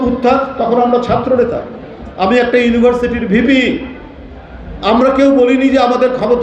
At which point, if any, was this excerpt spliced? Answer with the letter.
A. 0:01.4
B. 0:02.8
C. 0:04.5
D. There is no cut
D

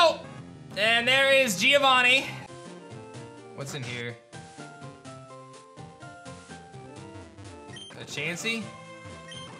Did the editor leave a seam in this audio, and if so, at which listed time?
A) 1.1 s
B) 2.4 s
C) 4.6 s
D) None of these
B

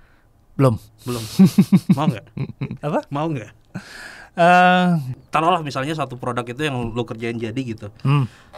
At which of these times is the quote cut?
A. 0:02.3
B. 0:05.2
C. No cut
B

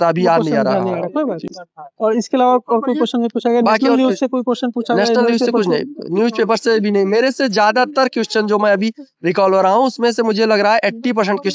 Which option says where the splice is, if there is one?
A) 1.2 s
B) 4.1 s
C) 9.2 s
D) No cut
D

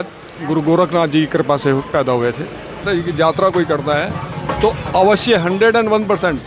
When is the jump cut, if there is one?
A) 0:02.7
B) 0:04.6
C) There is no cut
A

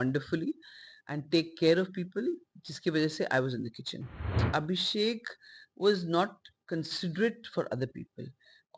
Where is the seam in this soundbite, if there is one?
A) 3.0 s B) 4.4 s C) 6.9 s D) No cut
B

